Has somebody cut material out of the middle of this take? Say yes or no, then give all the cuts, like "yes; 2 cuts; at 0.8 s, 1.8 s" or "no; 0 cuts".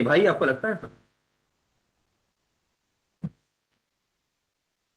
no; 0 cuts